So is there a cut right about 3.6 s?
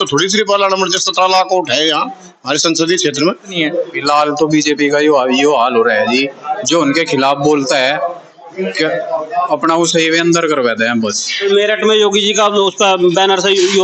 yes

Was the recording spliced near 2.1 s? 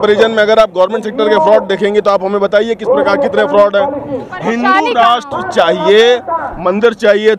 no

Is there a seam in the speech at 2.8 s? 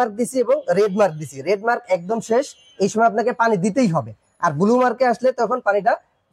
no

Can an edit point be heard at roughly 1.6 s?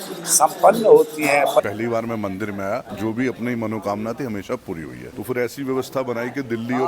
yes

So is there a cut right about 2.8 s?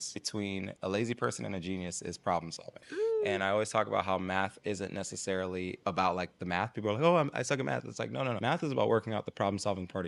no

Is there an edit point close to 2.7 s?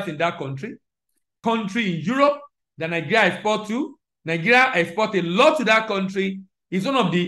no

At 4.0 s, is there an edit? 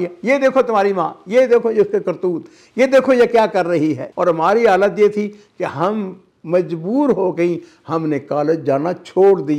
yes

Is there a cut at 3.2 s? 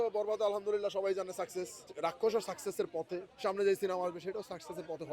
yes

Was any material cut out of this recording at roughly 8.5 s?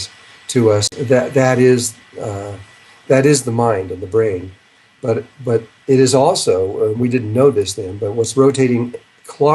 no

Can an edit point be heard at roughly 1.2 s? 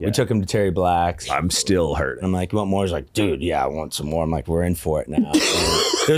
yes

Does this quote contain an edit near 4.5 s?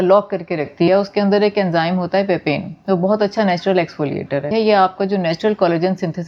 yes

